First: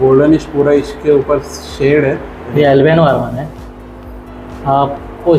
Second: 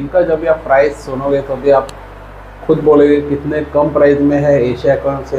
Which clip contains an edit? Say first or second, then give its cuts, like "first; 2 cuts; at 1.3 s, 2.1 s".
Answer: first; 1 cut; at 2.4 s